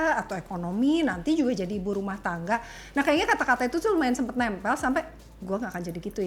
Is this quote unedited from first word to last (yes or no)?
yes